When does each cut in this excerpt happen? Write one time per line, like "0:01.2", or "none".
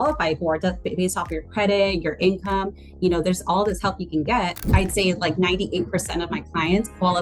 0:04.6